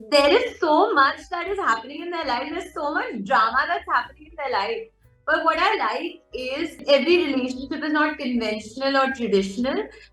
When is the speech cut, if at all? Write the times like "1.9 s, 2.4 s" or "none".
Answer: 6.8 s